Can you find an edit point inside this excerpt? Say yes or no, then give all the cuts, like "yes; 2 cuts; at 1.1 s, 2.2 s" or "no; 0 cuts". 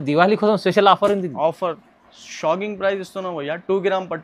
yes; 1 cut; at 1.6 s